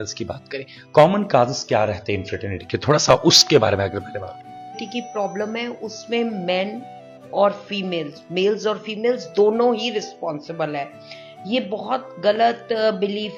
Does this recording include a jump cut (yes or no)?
no